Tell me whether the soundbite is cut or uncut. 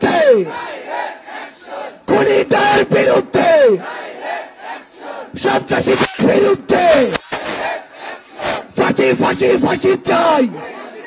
uncut